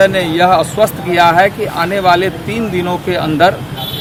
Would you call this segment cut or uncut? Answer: uncut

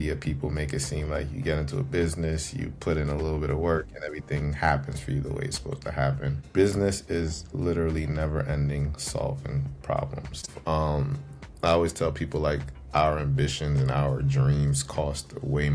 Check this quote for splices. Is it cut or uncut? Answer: cut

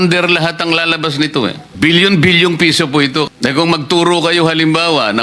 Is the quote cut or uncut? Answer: cut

